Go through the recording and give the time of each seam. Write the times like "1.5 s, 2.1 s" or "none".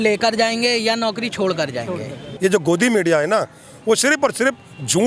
2.3 s